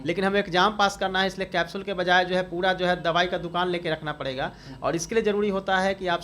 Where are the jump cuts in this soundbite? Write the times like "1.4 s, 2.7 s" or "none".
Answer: none